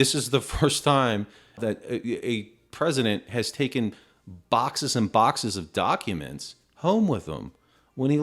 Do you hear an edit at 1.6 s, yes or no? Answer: yes